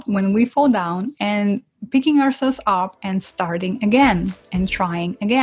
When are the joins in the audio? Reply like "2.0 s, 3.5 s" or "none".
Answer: none